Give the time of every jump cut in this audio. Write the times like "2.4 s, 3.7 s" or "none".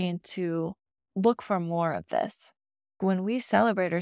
3.0 s